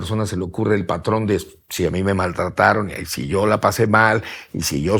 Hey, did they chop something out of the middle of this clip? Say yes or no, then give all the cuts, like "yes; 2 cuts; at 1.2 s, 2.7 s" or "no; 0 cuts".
no; 0 cuts